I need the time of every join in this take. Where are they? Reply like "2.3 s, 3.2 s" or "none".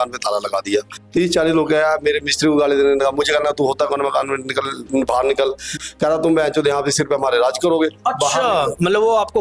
1.0 s, 5.8 s

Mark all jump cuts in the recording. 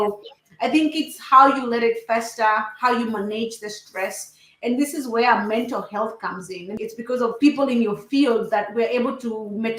7.2 s

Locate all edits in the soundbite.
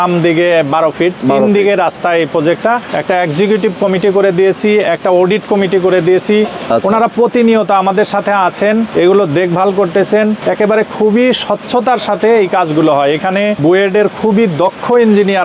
2.9 s, 8.9 s, 10.4 s, 13.6 s

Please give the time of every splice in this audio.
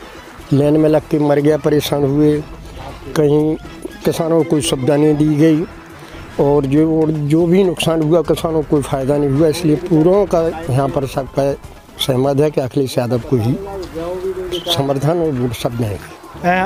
none

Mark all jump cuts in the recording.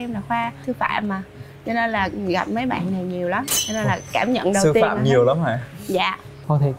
none

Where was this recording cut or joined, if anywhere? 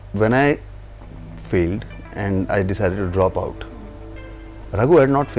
none

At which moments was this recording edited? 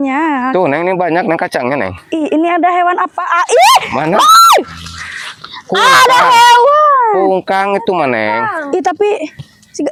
none

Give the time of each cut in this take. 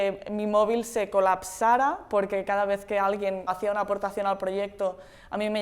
3.5 s

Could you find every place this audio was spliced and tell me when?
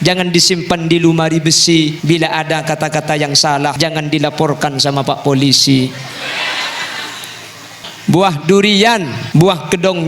2.0 s, 3.8 s, 7.9 s, 9.2 s

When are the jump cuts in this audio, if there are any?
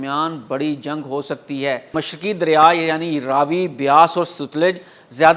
2.0 s

